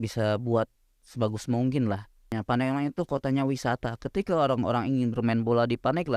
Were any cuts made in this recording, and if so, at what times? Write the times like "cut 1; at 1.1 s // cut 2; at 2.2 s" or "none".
cut 1; at 2.3 s